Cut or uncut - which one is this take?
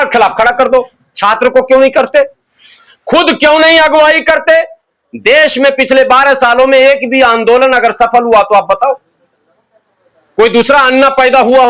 uncut